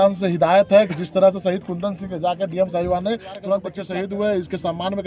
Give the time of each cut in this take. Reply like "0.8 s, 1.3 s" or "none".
3.8 s